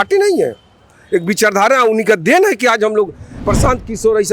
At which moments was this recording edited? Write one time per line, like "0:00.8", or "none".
0:03.3